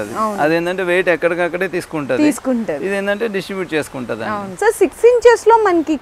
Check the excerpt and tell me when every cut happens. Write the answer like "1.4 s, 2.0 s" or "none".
4.4 s